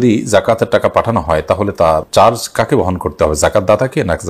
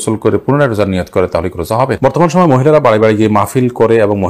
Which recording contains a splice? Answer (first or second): second